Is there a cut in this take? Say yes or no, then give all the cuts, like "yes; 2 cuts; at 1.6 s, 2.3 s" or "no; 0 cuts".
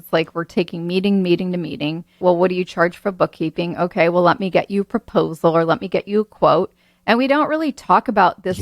yes; 1 cut; at 2.2 s